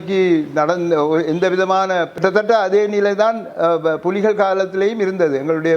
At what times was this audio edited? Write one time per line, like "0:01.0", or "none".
0:02.2